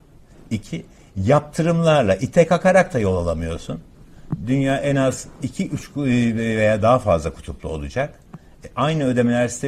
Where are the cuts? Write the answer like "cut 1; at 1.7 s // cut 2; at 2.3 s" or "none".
none